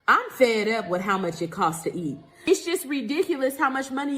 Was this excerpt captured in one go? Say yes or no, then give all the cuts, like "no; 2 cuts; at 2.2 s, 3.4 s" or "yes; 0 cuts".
no; 1 cut; at 2.3 s